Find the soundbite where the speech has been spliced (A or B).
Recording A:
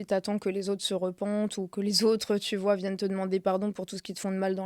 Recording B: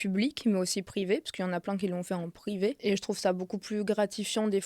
B